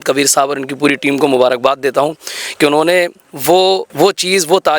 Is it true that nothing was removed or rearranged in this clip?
no; 1 cut; at 3.9 s

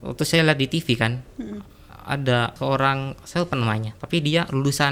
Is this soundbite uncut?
yes; 0 cuts

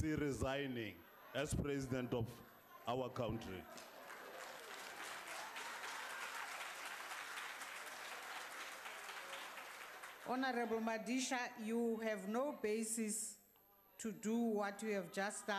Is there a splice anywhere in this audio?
no; 0 cuts

